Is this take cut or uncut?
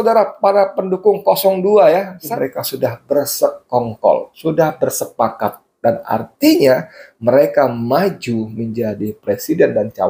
cut